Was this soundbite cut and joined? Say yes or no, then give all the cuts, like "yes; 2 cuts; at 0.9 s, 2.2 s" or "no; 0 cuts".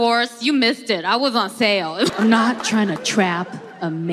yes; 1 cut; at 1.5 s